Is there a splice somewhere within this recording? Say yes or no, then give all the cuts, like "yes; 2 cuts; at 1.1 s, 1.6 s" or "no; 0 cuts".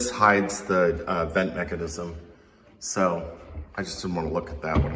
no; 0 cuts